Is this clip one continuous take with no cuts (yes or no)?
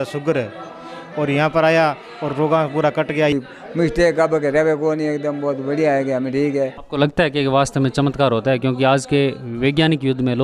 no